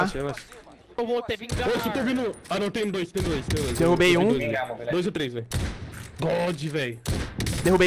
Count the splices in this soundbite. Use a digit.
1